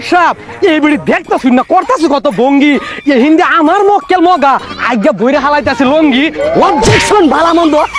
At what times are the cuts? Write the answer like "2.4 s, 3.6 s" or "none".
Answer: 6.4 s